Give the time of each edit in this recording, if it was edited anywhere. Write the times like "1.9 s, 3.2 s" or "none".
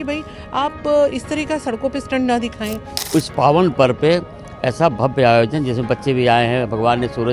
2.9 s